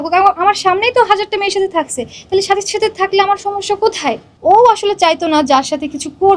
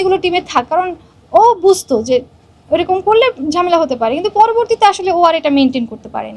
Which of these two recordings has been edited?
first; 1 cut; at 4.3 s

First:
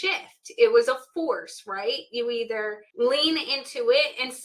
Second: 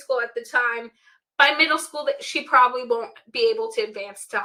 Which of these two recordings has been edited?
first; 1 cut; at 2.8 s

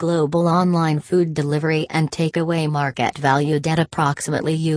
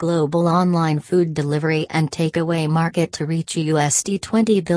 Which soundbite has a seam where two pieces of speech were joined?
first; 1 cut; at 2.3 s

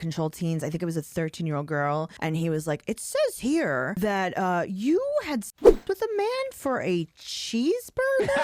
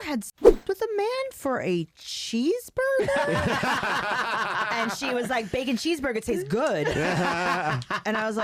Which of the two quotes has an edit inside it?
first; 2 cuts; at 2.1 s, 3.9 s

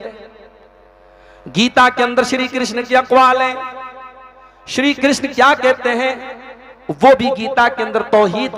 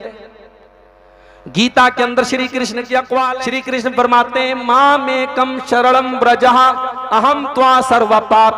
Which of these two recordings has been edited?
second; 1 cut; at 3.5 s

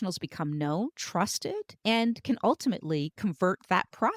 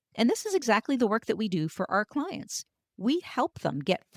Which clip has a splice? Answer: first; 1 cut; at 1.3 s

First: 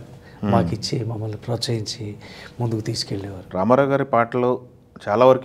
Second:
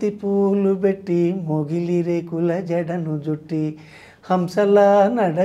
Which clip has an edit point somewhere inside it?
first; 1 cut; at 3.5 s

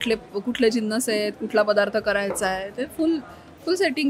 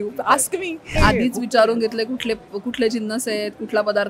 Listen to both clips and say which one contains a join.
second; 1 cut; at 0.9 s

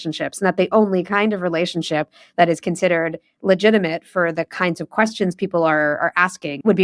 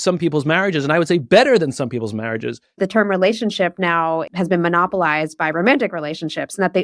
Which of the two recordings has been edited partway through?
second; 2 cuts; at 2.8 s, 4.3 s

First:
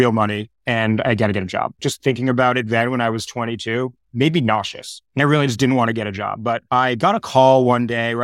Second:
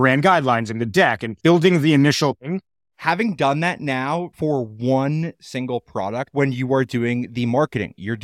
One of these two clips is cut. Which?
second; 3 cuts; at 1.3 s, 2.5 s, 6.3 s

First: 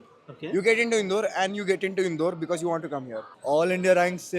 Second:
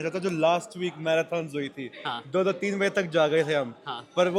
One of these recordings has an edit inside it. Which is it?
first; 1 cut; at 3.3 s

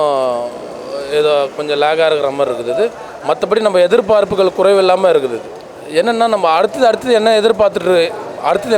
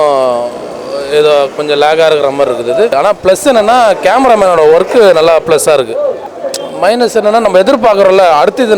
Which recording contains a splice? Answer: second; 2 cuts; at 2.9 s, 6.3 s

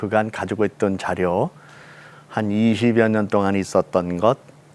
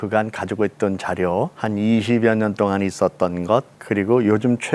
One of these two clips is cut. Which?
second; 2 cuts; at 1.5 s, 3.8 s

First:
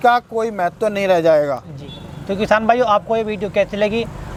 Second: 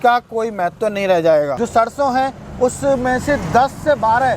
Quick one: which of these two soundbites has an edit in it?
second; 1 cut; at 1.5 s

